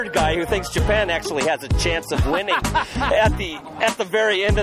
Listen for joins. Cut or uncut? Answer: uncut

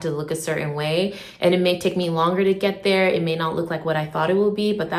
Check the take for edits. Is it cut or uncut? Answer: uncut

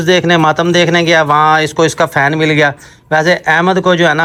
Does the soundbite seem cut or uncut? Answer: uncut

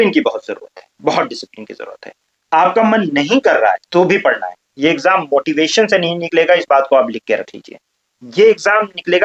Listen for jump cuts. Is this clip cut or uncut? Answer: uncut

